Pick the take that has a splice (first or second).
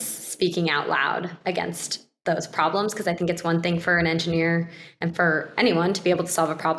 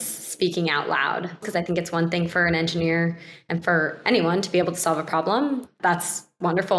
second